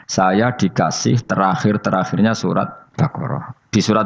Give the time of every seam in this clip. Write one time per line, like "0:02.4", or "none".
0:02.8